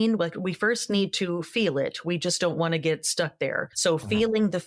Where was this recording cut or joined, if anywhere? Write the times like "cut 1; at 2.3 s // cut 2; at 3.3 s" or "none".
cut 1; at 3.7 s